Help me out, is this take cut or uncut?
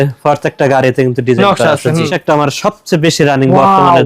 cut